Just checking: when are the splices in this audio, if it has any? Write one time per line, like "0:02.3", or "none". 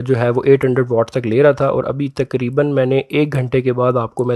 none